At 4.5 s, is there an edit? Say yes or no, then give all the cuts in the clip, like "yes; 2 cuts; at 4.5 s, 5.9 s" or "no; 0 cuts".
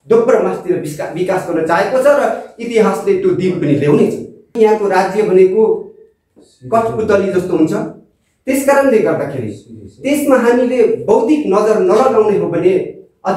yes; 1 cut; at 4.5 s